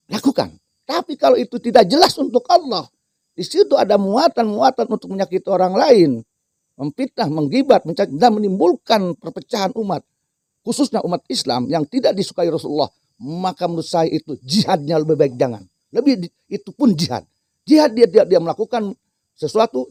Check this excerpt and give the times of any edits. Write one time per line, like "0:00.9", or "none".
none